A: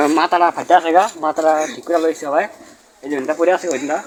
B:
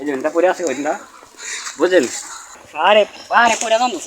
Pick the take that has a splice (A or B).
B